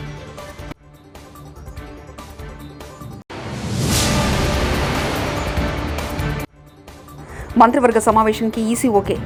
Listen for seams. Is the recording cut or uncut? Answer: uncut